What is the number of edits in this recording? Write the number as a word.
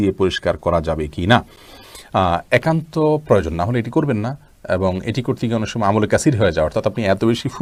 zero